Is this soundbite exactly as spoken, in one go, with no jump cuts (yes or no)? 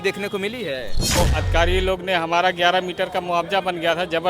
no